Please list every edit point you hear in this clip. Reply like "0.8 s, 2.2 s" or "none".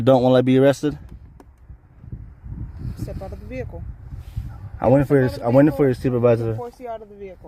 none